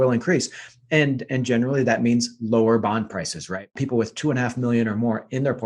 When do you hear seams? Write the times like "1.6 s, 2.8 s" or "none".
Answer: 3.7 s